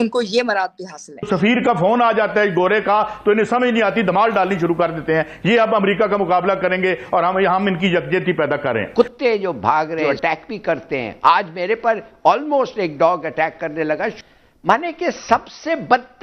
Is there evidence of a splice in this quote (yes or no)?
yes